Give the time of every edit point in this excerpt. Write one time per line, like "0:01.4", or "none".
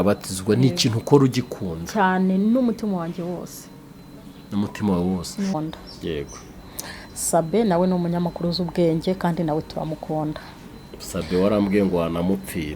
0:05.5